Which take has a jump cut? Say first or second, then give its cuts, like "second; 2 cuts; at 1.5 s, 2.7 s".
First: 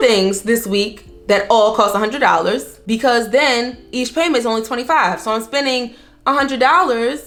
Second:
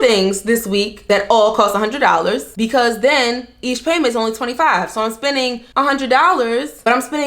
second; 3 cuts; at 0.9 s, 2.5 s, 5.6 s